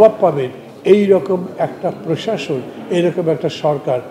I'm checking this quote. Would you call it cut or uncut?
uncut